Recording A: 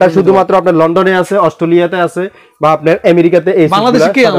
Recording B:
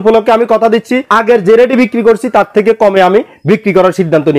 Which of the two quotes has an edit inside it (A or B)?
B